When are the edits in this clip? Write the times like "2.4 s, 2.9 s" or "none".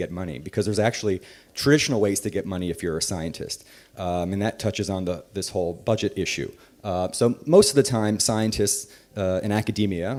none